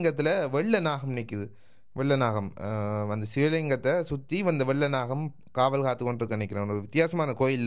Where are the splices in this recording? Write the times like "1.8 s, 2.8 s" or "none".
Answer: none